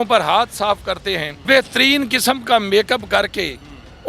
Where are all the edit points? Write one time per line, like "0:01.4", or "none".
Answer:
0:01.3